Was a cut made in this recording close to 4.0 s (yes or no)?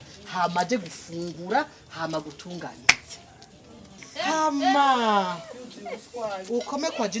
yes